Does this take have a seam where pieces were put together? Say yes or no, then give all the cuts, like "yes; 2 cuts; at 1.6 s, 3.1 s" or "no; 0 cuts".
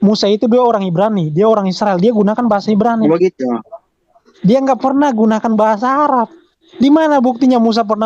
no; 0 cuts